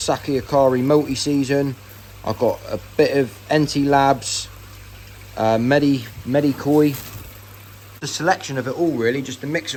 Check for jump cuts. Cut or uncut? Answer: uncut